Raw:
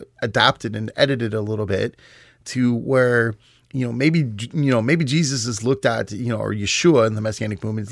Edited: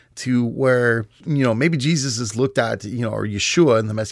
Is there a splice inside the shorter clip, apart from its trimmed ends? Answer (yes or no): yes